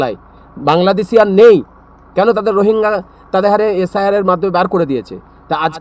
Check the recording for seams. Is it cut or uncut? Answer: uncut